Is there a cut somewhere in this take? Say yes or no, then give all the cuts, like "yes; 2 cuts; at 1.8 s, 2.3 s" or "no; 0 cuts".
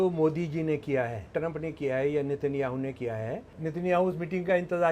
yes; 2 cuts; at 1.3 s, 3.5 s